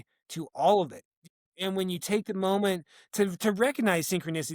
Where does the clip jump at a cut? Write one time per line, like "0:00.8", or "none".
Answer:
0:01.4